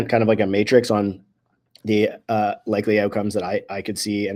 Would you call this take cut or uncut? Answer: uncut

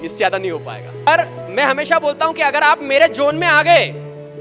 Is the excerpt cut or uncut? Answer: cut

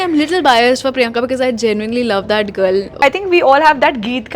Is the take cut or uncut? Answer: cut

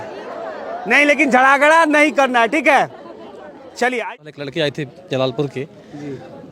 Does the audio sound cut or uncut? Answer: cut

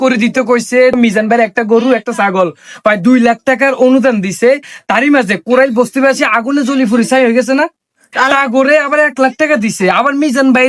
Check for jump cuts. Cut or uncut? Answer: cut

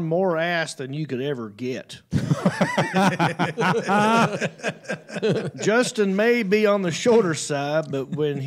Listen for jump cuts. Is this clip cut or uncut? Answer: uncut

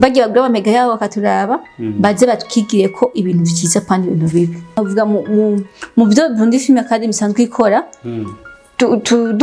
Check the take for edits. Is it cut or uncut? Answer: cut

